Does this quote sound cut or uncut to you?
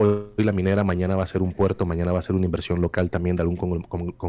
uncut